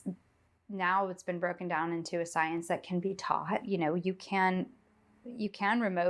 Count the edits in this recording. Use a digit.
1